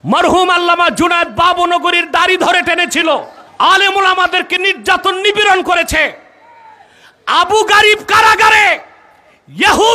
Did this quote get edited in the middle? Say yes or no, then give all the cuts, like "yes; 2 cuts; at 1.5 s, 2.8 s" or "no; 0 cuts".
yes; 1 cut; at 3.4 s